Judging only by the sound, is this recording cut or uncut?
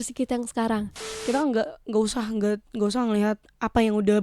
cut